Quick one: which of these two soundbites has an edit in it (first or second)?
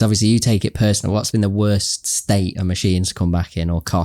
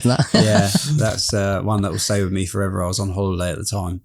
first